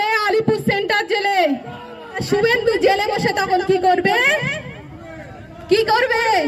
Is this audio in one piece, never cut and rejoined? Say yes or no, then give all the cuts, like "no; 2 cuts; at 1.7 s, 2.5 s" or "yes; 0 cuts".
no; 1 cut; at 2.2 s